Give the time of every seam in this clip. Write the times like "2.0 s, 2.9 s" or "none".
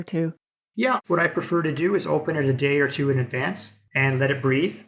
1.0 s, 3.8 s